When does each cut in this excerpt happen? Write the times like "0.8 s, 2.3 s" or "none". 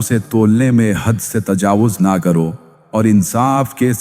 2.7 s